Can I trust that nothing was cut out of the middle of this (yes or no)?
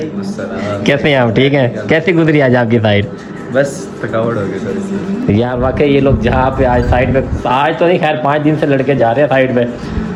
yes